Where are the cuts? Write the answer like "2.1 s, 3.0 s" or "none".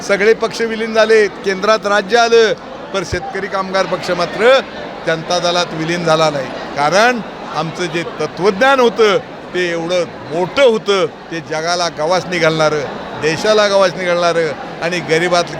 6.6 s